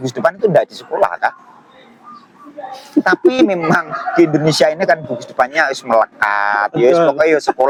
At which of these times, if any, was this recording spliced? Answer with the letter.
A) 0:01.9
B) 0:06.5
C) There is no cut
C